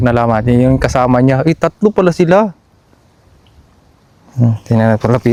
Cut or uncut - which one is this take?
uncut